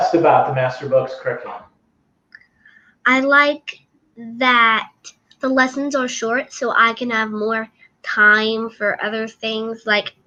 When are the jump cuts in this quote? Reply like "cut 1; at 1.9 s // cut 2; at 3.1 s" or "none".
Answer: none